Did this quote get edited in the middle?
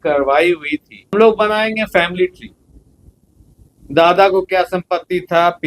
yes; 1 cut; at 1.1 s

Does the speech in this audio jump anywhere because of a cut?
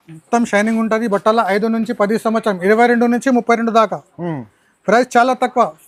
no; 0 cuts

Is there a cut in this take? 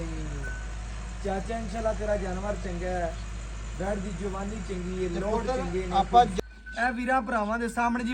yes; 1 cut; at 6.3 s

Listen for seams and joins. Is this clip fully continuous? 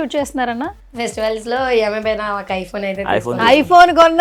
yes; 0 cuts

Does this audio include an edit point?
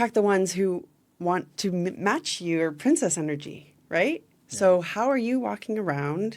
no; 0 cuts

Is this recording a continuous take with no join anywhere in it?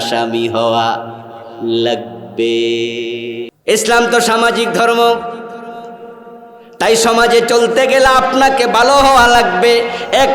no; 1 cut; at 3.5 s

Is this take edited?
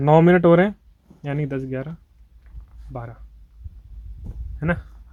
no; 0 cuts

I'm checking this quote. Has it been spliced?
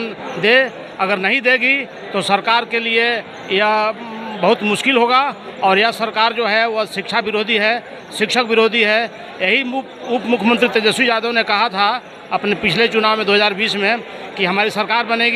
no; 0 cuts

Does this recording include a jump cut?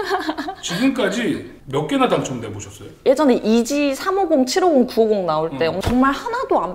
yes; 2 cuts; at 2.9 s, 5.8 s

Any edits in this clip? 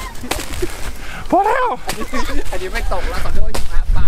no; 0 cuts

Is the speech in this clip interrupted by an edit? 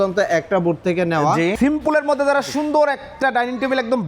yes; 1 cut; at 1.5 s

